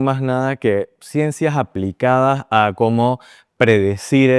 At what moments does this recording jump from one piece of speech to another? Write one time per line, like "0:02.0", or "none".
none